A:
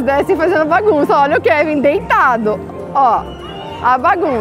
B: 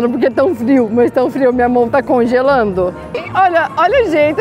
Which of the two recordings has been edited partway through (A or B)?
B